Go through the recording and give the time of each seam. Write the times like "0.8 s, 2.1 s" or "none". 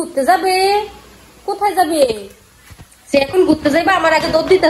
none